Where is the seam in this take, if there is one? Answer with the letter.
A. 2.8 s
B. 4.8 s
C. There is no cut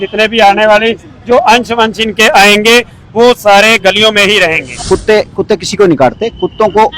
B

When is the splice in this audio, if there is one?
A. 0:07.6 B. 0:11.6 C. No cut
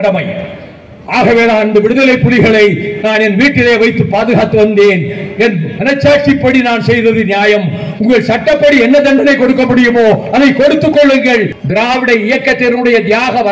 B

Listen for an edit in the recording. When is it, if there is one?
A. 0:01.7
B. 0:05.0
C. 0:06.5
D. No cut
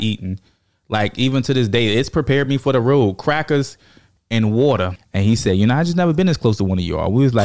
B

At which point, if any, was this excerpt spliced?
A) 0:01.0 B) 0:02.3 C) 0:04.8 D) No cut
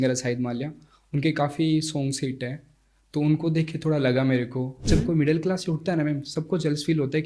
C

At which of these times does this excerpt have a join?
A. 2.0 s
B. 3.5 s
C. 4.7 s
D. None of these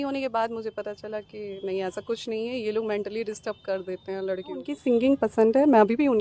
C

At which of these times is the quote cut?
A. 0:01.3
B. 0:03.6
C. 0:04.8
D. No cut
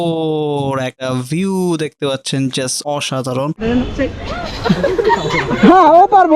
B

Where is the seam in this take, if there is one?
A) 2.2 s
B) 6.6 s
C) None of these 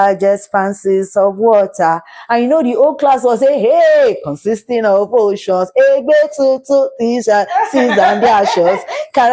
C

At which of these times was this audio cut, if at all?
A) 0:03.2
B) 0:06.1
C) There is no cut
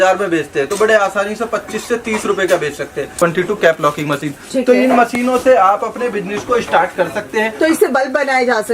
A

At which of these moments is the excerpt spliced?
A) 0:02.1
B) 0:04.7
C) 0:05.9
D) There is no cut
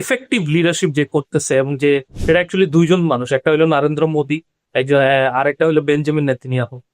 A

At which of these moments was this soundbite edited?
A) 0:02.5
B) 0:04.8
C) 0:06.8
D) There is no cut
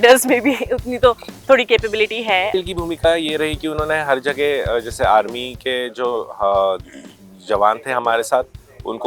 A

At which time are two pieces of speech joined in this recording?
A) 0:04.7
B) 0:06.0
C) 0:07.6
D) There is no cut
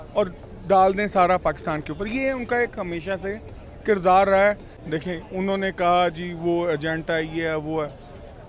A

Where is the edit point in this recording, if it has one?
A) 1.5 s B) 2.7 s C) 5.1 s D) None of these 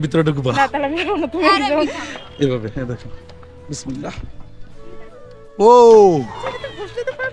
D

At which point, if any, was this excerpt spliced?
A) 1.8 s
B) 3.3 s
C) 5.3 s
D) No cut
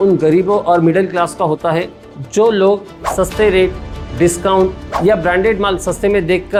D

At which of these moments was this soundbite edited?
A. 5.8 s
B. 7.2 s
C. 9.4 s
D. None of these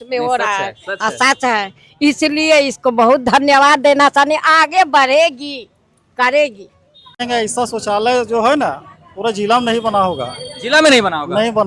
B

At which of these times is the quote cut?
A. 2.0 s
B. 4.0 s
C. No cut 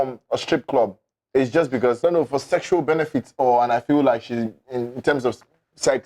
A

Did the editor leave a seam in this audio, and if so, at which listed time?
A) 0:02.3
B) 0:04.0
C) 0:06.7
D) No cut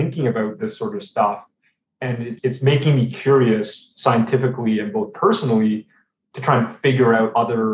A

